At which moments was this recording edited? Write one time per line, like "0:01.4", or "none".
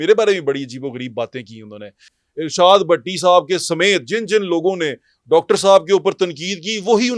0:02.1